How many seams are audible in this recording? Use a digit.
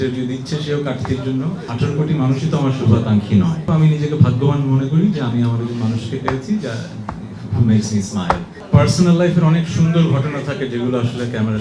3